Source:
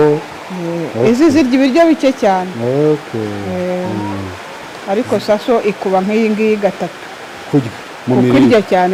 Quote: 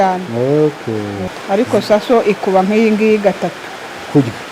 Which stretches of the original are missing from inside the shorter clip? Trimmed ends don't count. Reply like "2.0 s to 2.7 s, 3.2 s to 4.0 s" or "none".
3.5 s to 4.6 s